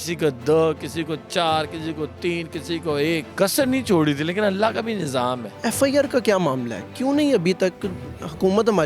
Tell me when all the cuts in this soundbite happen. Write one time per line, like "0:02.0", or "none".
0:03.3
0:05.5